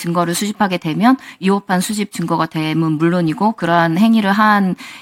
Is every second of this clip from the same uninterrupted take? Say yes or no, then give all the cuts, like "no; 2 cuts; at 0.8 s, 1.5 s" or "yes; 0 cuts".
yes; 0 cuts